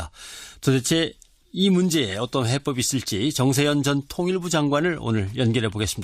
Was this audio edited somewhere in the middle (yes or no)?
yes